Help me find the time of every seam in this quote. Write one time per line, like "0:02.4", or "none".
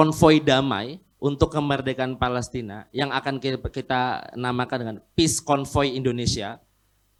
none